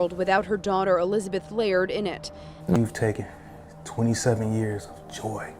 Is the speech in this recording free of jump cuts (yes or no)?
no